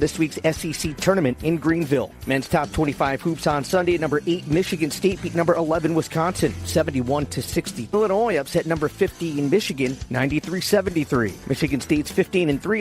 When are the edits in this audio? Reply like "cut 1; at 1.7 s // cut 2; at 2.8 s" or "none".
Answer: cut 1; at 2.1 s // cut 2; at 7.9 s